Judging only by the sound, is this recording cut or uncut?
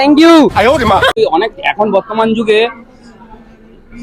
cut